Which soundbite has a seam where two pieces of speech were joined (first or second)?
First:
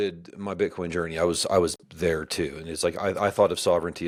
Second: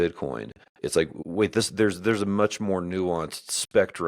second